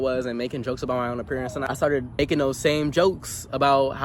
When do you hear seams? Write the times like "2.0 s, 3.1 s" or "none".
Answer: 2.2 s